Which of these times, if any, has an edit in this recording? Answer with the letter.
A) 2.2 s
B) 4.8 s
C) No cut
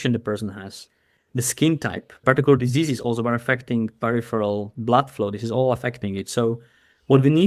A